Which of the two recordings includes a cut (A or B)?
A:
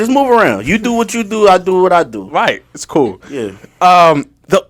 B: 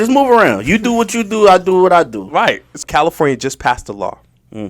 B